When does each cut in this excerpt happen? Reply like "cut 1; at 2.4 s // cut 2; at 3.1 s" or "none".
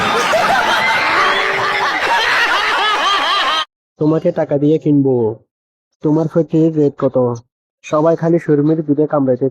cut 1; at 1.0 s